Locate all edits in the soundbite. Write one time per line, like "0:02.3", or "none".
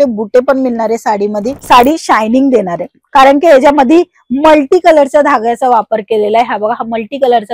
0:01.5